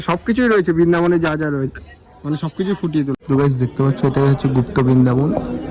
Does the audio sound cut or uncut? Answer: cut